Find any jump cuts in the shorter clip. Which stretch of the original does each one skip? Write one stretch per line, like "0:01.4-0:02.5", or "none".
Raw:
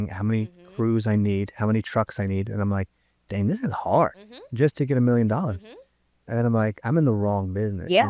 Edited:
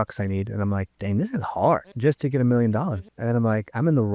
0:02.9-0:03.2
0:04.2-0:04.5
0:05.6-0:06.2